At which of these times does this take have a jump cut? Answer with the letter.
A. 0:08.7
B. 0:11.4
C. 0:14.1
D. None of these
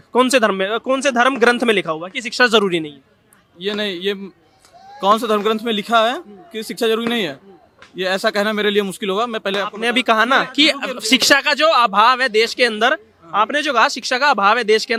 D